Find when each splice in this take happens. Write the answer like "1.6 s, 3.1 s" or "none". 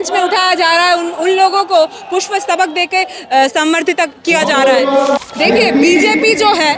5.2 s

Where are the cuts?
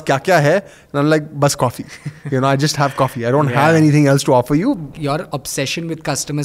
4.9 s

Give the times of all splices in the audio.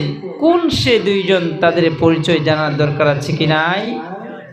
none

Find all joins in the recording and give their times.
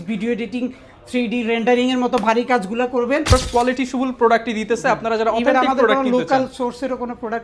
3.3 s

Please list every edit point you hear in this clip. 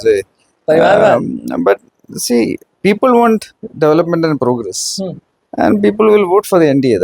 none

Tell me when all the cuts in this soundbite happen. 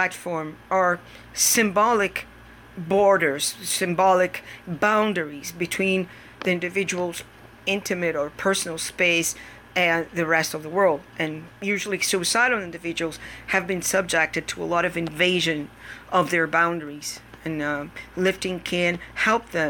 none

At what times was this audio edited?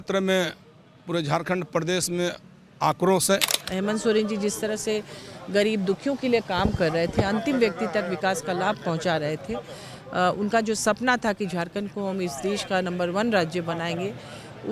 3.6 s

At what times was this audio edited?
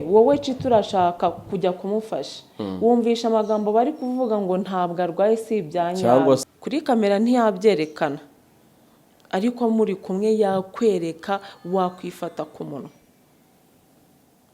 6.4 s

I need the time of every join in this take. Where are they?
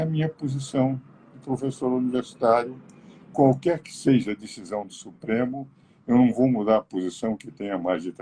none

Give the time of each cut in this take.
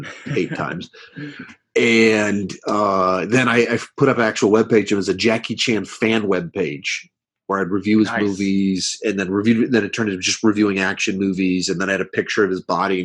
none

